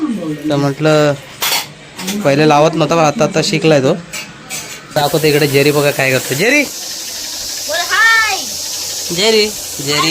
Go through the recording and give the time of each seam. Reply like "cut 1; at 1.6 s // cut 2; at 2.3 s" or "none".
cut 1; at 5.0 s